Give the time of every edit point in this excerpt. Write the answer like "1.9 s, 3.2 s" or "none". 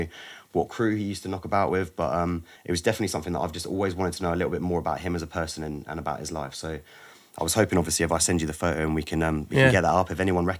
2.5 s